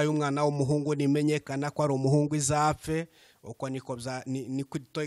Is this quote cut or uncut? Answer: uncut